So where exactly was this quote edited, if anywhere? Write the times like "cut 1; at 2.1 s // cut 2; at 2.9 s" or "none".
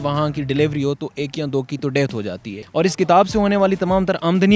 cut 1; at 2.5 s

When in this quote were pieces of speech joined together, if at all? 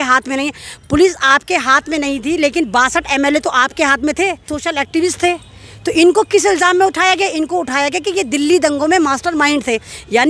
cut 1; at 4.5 s

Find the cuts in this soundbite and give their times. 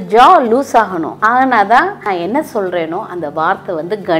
cut 1; at 1.1 s // cut 2; at 2.0 s

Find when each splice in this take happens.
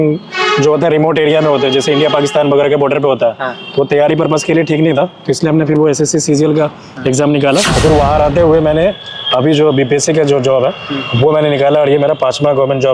cut 1; at 7.7 s

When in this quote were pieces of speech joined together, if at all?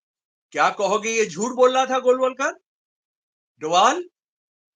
none

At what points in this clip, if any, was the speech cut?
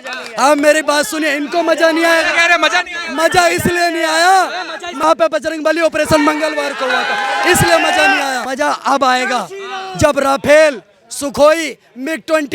cut 1; at 5.0 s // cut 2; at 8.4 s

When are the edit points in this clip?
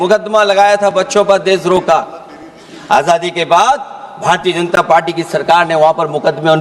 none

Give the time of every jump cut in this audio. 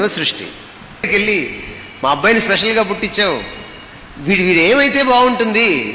cut 1; at 1.1 s

